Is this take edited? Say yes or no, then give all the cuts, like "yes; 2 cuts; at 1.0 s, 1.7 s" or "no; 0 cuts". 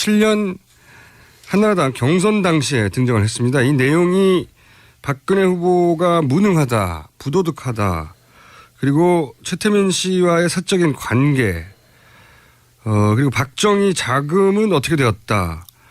yes; 1 cut; at 7.2 s